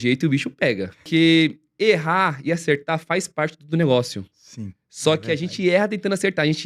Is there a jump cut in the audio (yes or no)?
yes